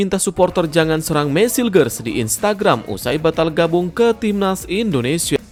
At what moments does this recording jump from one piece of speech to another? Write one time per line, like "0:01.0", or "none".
none